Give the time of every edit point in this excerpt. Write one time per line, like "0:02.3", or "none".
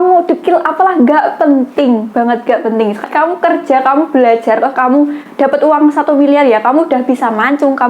0:03.0